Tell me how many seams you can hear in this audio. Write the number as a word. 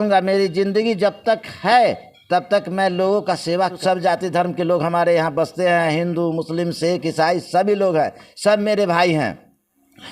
one